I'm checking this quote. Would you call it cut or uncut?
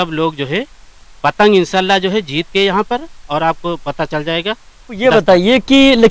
cut